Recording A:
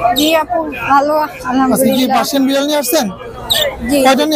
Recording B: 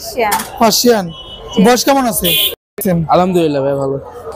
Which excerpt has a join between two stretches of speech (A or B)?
B